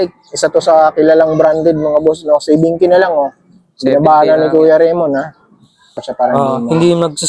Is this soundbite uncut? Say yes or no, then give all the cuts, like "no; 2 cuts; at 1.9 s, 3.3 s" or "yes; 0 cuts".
no; 1 cut; at 6.1 s